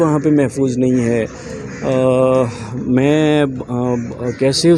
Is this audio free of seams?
yes; 0 cuts

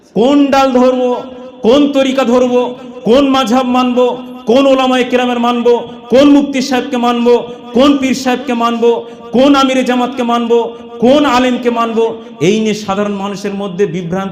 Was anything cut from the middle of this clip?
no; 0 cuts

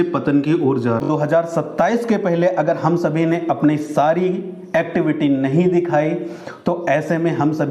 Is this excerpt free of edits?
no; 1 cut; at 1.0 s

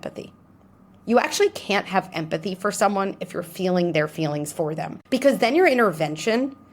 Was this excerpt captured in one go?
no; 1 cut; at 4.9 s

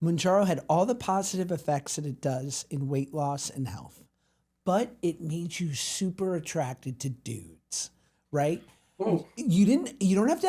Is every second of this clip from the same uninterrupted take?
yes; 0 cuts

